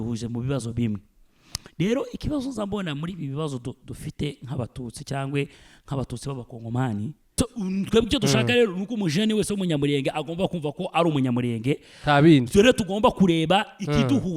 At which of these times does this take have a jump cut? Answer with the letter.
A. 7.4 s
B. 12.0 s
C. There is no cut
A